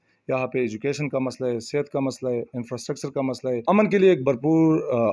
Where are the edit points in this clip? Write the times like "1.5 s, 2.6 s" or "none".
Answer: 3.6 s